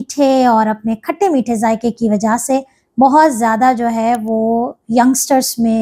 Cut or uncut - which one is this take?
uncut